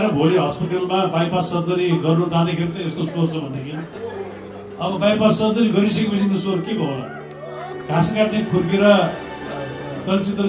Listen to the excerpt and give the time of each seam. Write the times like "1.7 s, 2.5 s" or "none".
7.5 s

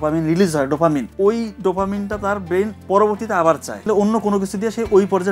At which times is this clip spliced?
1.1 s, 3.8 s

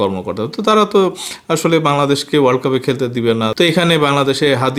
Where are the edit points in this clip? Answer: none

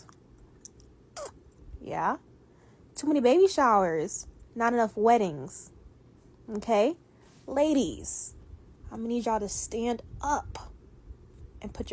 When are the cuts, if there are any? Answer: none

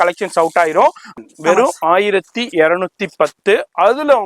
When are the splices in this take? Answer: 1.2 s

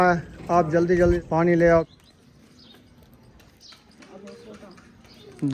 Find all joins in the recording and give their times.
1.2 s, 1.9 s

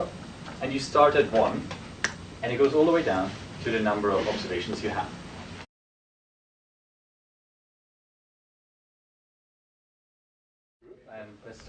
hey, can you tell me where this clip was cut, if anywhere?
none

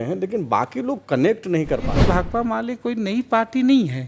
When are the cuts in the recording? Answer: 1.9 s

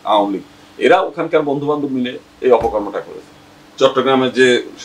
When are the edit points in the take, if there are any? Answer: none

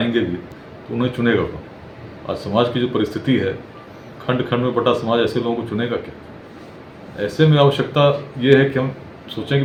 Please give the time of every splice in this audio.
none

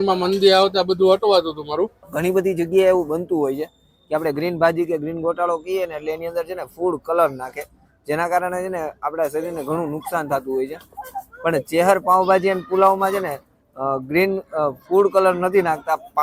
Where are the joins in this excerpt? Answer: 2.0 s

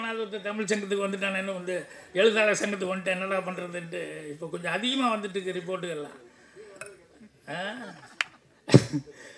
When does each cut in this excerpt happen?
none

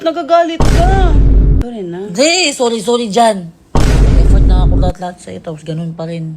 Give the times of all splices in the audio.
1.6 s

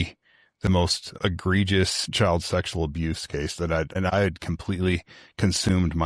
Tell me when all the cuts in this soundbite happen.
1.0 s, 2.0 s, 4.0 s

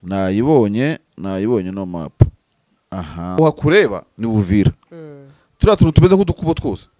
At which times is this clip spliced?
3.4 s

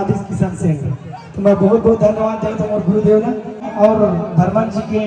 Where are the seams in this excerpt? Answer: 3.7 s

